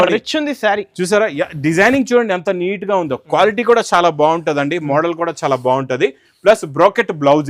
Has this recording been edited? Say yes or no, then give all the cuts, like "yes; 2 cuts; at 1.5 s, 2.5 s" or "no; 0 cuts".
no; 0 cuts